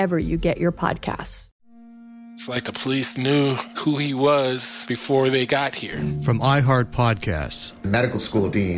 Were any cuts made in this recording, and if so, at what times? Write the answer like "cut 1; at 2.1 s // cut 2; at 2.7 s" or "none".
cut 1; at 1.3 s